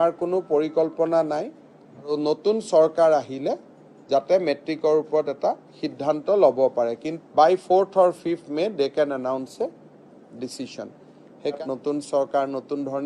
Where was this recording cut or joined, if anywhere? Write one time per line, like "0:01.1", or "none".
0:02.1
0:07.1
0:11.6